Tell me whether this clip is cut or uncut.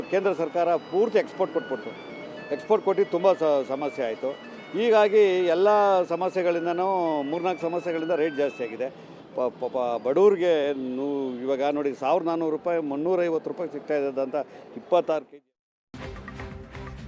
cut